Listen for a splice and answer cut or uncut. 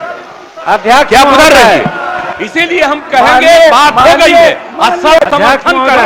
uncut